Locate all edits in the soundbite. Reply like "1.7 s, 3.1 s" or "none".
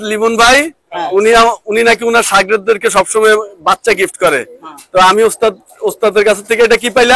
none